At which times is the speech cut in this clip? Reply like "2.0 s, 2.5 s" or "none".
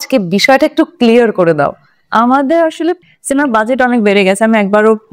3.0 s